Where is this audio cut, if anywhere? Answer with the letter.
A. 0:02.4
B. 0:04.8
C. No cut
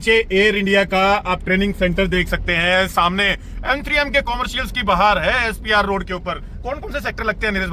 C